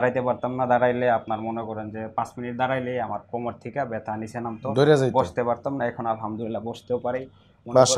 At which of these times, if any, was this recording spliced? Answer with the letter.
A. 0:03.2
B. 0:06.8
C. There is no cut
C